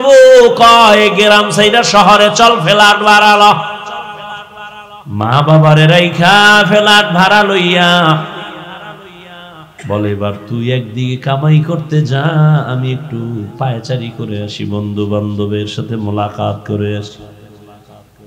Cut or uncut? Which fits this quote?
cut